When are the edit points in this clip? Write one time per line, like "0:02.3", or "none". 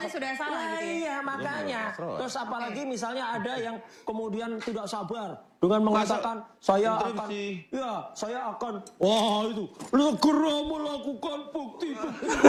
none